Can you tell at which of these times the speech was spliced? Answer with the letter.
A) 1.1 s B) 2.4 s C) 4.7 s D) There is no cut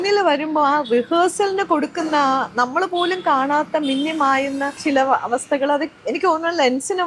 C